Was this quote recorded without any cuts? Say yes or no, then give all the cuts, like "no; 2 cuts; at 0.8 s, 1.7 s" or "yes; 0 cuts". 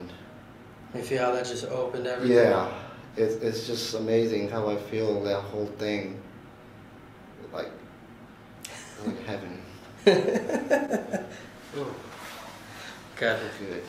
yes; 0 cuts